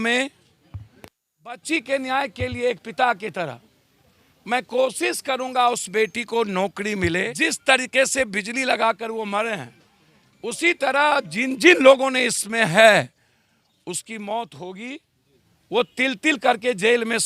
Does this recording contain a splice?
yes; 1 cut; at 7.3 s

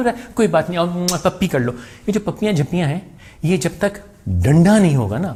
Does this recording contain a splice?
no; 0 cuts

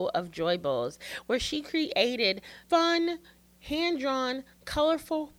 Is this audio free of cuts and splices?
no; 1 cut; at 2.5 s

